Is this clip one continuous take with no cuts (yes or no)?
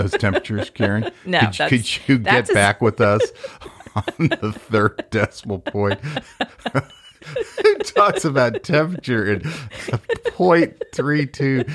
no